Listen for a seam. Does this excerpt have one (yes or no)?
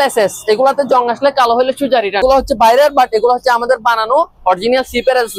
yes